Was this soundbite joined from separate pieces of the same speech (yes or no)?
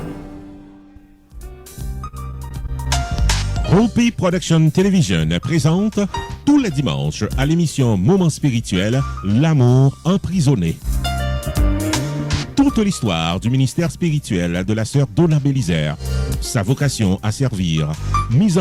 yes